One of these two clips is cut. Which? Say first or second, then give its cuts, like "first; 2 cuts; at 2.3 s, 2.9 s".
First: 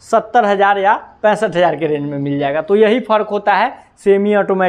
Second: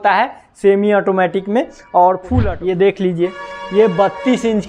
second; 1 cut; at 2.3 s